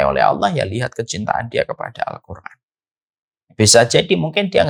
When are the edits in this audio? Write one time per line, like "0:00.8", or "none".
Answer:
none